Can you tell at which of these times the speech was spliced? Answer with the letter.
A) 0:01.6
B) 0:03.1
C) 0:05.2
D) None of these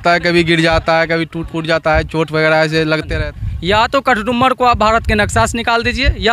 B